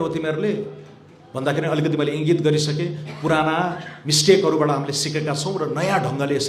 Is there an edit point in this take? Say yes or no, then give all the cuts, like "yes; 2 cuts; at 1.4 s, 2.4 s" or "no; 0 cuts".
no; 0 cuts